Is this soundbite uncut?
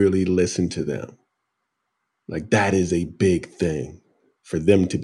no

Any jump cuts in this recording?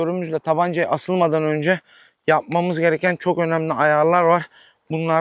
no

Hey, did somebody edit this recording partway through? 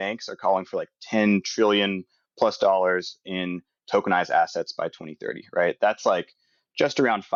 no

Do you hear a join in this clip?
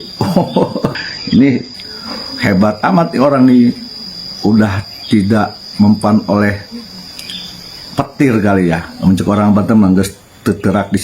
yes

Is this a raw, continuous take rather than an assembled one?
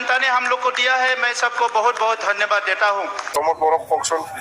no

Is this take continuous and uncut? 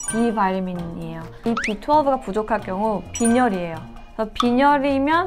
no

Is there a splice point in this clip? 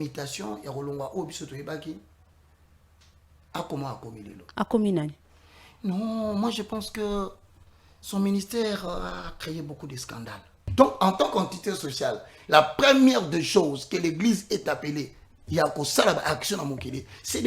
yes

